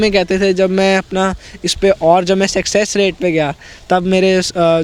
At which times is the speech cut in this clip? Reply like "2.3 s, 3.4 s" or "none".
none